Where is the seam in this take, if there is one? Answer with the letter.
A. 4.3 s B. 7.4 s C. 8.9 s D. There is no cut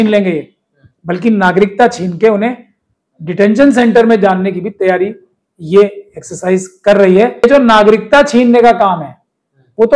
B